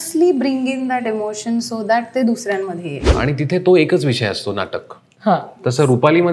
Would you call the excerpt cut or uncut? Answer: cut